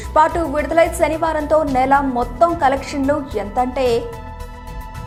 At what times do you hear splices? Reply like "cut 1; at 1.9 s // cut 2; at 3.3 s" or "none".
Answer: none